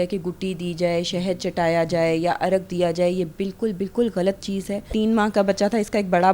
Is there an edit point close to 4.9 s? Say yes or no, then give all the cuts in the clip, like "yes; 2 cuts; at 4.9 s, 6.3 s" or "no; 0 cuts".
yes; 1 cut; at 4.9 s